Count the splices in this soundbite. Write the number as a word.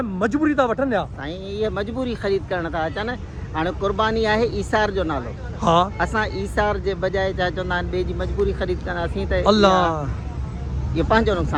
zero